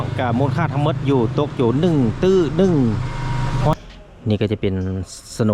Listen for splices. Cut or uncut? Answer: cut